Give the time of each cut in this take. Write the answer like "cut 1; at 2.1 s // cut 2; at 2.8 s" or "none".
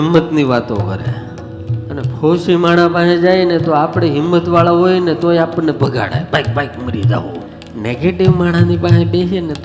cut 1; at 1.8 s // cut 2; at 7.6 s